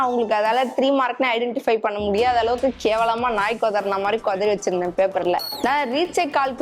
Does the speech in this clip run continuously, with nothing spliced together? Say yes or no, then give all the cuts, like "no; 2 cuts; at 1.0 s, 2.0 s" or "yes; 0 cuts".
no; 1 cut; at 5.5 s